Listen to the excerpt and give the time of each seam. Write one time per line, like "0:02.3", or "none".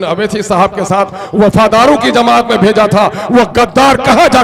none